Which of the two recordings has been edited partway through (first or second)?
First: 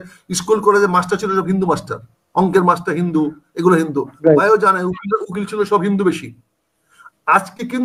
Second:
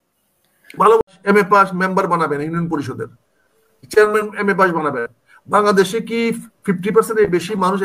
second